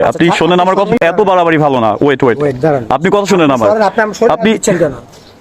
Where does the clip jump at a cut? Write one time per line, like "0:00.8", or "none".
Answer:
0:01.0